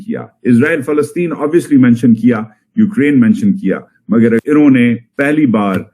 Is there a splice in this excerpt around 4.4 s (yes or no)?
yes